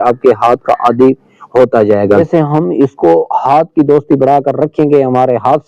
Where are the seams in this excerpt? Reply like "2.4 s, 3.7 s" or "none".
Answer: 2.2 s